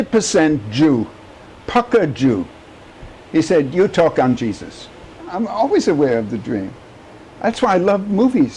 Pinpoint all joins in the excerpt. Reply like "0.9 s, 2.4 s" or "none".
5.3 s